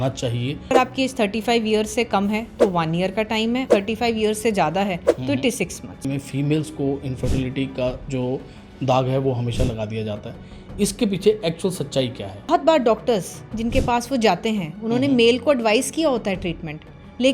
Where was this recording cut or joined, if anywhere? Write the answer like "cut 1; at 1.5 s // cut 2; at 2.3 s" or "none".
cut 1; at 0.7 s // cut 2; at 3.7 s // cut 3; at 6.0 s // cut 4; at 12.5 s

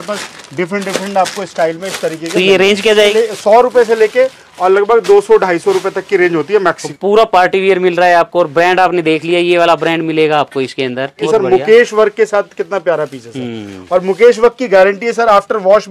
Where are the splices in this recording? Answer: cut 1; at 3.0 s // cut 2; at 6.9 s // cut 3; at 11.3 s

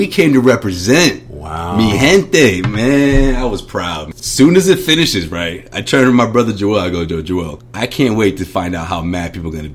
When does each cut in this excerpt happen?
cut 1; at 4.2 s // cut 2; at 7.6 s

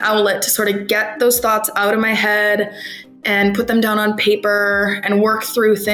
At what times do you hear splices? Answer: none

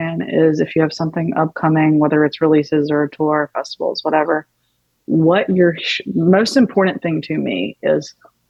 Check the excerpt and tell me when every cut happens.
none

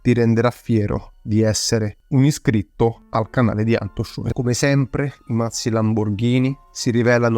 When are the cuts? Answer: cut 1; at 4.2 s

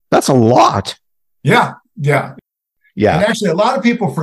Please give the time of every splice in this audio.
cut 1; at 2.3 s

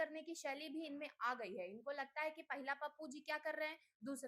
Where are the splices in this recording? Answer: none

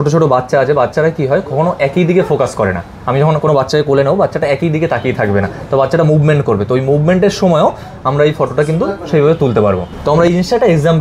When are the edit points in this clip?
none

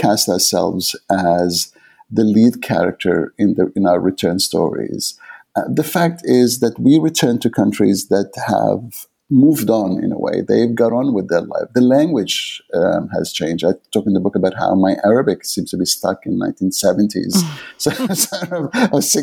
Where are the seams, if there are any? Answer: none

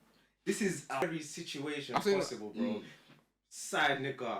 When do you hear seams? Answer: cut 1; at 1.0 s

